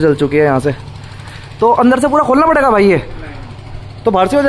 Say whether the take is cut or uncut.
uncut